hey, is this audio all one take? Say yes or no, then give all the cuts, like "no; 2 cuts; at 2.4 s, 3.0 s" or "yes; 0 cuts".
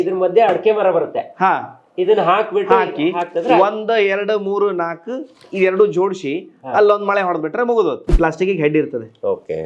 no; 1 cut; at 8.1 s